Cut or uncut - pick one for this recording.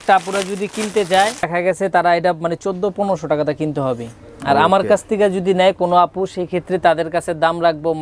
uncut